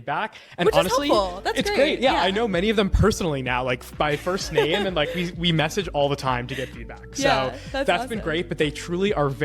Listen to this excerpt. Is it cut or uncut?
uncut